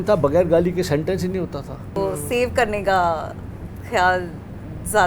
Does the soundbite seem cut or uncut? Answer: cut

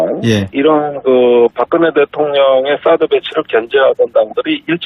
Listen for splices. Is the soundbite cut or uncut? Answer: cut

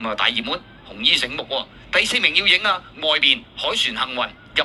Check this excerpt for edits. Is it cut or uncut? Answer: uncut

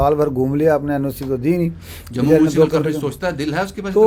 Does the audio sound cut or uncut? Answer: uncut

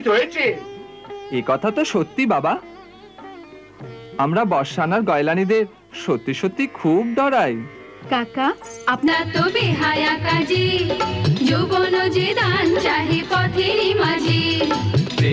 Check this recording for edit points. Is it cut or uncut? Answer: cut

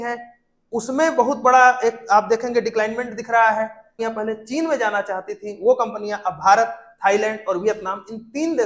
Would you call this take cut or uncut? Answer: cut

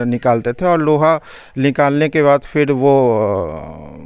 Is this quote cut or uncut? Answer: uncut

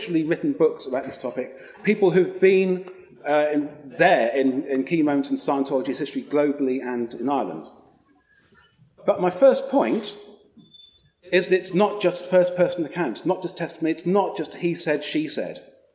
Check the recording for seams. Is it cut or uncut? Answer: uncut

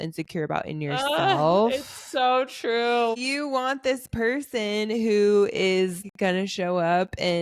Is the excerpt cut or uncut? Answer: cut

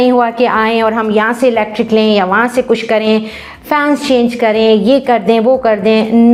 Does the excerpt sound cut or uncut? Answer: uncut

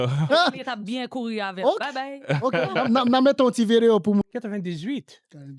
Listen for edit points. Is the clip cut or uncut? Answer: cut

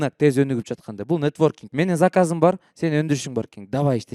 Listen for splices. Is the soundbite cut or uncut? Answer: cut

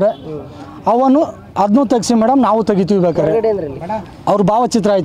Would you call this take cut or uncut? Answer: cut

